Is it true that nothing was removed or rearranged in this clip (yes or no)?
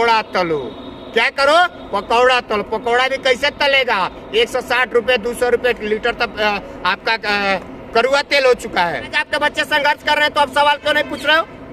no